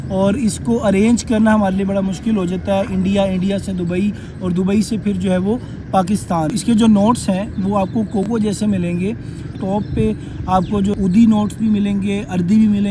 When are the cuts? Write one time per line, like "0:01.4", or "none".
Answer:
0:06.6
0:09.5
0:10.9